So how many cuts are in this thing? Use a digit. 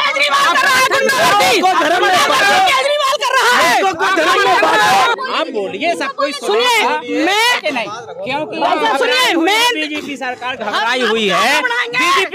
1